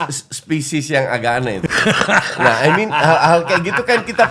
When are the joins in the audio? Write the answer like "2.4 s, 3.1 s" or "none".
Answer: 1.7 s